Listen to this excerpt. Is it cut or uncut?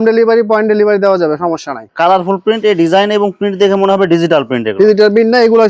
cut